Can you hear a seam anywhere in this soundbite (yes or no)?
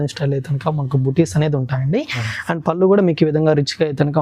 no